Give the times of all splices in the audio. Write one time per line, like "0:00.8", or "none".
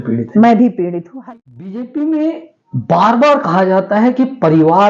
0:01.0